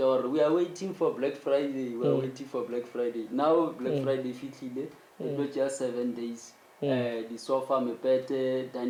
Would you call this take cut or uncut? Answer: uncut